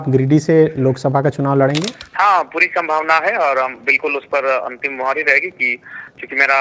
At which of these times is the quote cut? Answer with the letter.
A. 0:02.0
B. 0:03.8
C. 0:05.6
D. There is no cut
A